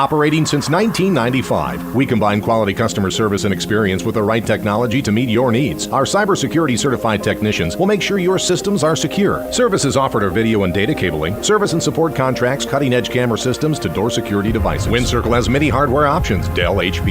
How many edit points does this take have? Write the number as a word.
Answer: one